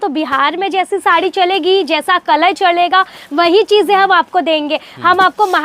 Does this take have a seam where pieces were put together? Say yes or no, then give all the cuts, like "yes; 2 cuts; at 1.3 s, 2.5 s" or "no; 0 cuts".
no; 0 cuts